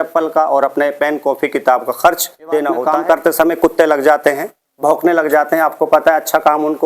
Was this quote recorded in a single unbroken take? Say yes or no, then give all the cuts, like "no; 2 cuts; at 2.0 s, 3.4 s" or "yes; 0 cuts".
no; 1 cut; at 2.9 s